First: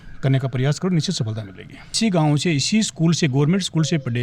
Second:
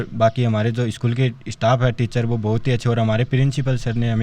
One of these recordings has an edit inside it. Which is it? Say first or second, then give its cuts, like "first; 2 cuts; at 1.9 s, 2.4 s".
first; 1 cut; at 2.0 s